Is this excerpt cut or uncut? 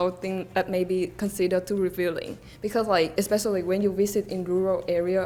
uncut